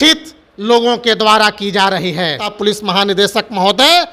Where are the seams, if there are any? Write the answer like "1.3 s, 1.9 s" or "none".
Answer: 2.5 s